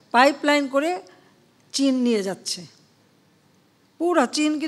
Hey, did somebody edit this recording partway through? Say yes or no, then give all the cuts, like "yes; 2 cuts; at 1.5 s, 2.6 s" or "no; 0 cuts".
no; 0 cuts